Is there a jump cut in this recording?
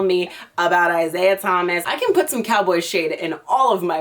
yes; 1 cut; at 1.8 s

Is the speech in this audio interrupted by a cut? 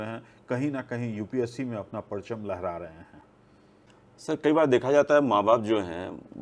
no; 0 cuts

